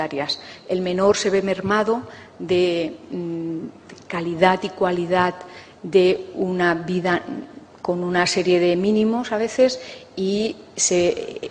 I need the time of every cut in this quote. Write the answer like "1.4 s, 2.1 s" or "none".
9.5 s